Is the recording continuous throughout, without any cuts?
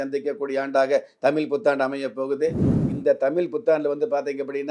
no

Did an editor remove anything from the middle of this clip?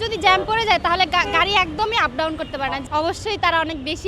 yes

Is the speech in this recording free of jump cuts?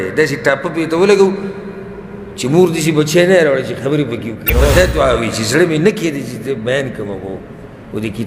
no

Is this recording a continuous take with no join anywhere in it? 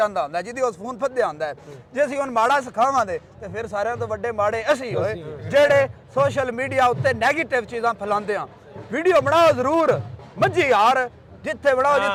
yes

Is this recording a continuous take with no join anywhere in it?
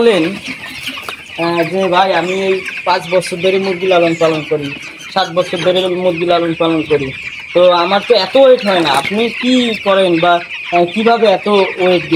yes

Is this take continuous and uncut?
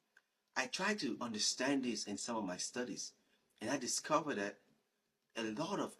yes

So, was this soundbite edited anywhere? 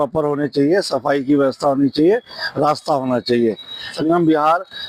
yes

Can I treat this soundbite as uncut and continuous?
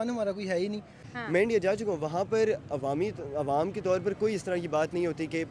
no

